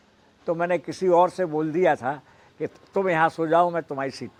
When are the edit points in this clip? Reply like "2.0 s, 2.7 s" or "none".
none